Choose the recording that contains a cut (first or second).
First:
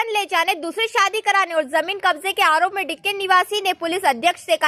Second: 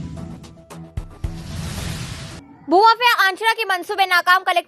second